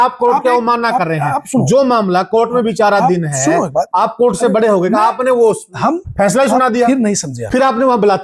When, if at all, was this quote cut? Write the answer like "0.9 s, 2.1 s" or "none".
7.3 s